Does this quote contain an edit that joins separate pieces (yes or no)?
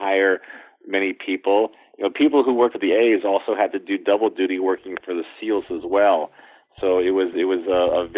yes